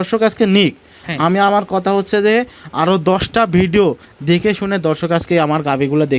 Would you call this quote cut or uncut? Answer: uncut